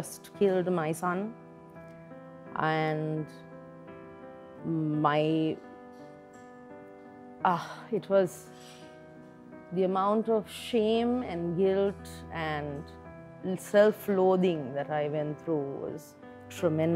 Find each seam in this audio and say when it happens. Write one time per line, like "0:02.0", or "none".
0:05.9
0:07.4